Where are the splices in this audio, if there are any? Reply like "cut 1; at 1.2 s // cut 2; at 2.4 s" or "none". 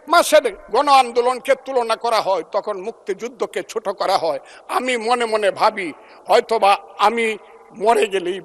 none